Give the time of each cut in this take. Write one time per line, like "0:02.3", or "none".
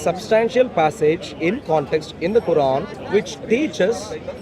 0:03.0